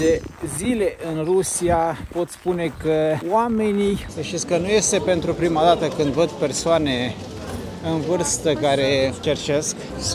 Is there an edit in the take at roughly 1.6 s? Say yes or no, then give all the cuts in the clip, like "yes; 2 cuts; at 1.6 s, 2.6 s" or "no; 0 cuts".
no; 2 cuts; at 3.2 s, 4.1 s